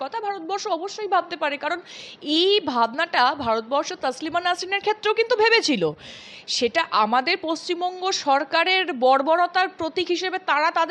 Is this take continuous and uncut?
yes; 0 cuts

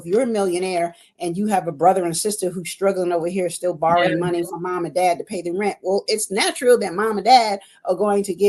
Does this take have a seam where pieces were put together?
no; 0 cuts

